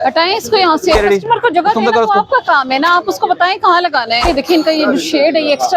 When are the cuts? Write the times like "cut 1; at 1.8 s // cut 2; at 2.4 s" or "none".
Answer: cut 1; at 1.0 s // cut 2; at 4.2 s